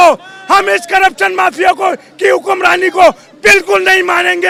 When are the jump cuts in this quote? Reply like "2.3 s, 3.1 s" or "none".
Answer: none

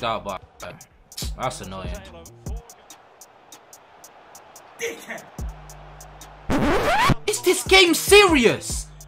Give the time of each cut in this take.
2.7 s

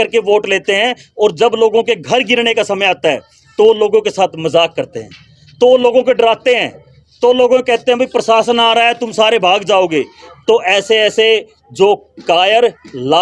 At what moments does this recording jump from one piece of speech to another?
none

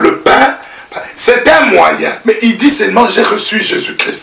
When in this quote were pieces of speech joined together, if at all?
2.1 s

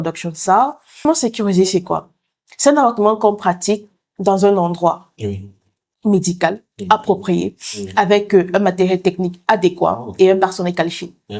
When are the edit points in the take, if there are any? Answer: 1.0 s

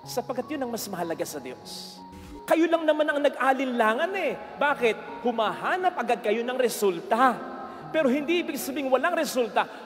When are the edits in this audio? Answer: 2.1 s

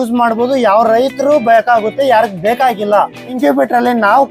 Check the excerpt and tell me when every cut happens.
3.2 s

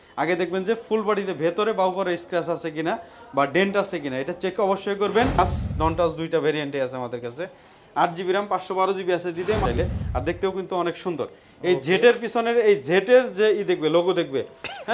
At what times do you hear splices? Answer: 5.4 s, 9.6 s

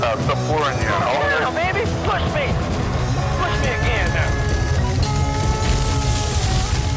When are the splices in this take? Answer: none

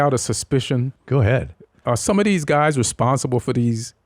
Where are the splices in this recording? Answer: 1.3 s

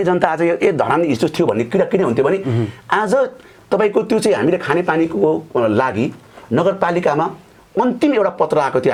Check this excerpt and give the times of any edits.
none

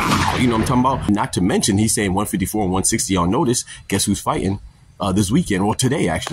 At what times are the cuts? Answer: 1.1 s

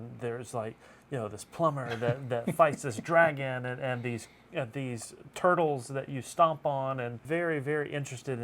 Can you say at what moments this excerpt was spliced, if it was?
7.2 s

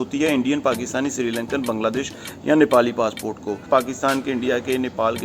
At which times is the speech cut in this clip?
3.6 s

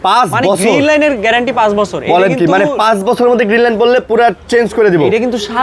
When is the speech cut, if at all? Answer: none

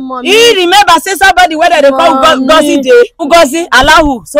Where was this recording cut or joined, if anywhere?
3.2 s

